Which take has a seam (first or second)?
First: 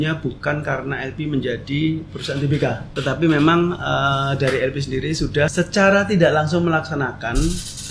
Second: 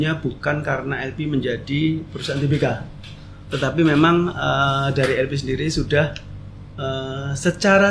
first